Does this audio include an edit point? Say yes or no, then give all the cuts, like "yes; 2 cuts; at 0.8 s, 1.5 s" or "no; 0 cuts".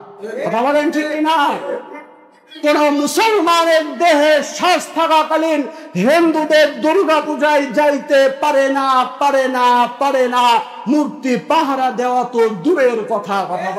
no; 0 cuts